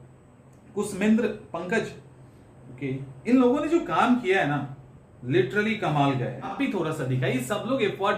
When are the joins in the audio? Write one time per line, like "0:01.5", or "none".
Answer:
0:03.2
0:06.5